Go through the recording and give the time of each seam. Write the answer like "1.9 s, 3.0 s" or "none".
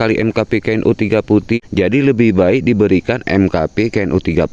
1.6 s